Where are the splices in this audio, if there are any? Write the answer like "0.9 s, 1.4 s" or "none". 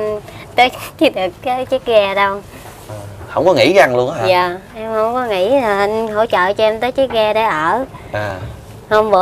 none